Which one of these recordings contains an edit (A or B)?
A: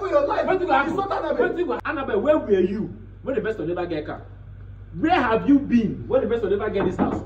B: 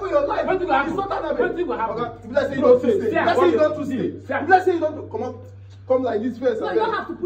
A